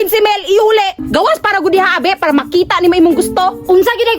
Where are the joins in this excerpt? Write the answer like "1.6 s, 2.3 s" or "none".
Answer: 1.0 s